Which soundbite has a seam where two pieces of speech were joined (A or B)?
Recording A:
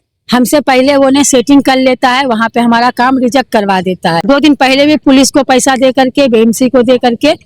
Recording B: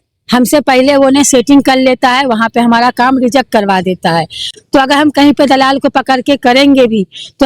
A